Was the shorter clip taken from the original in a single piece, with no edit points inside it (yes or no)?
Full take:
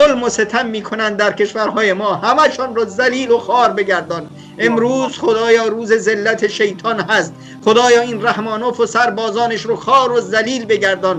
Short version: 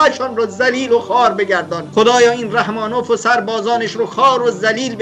no